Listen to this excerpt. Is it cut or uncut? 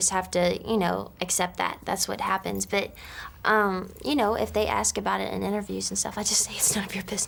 uncut